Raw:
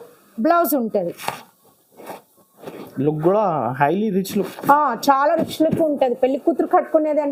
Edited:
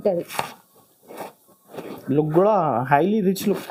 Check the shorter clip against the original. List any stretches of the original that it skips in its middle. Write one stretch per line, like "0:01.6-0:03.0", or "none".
none